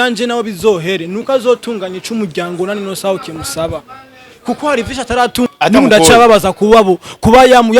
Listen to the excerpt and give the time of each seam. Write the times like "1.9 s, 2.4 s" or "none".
5.5 s